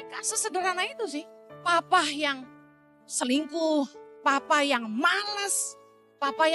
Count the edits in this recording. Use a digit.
1